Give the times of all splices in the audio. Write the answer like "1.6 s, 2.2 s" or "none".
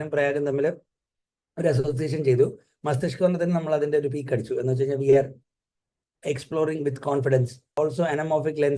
7.8 s